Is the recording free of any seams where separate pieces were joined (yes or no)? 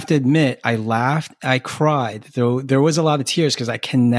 yes